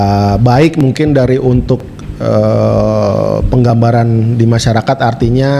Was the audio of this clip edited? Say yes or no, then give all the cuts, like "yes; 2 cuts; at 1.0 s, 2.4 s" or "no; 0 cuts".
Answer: no; 0 cuts